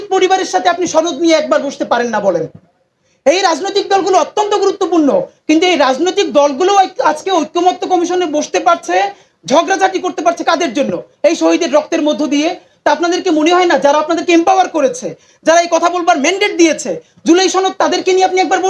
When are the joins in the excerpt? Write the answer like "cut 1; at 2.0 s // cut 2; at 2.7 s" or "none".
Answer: none